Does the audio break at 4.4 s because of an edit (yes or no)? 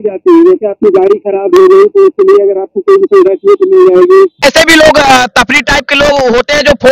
yes